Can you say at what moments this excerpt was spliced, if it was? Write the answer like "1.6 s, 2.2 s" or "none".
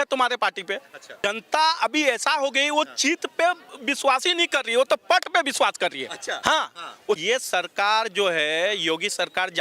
1.1 s, 7.2 s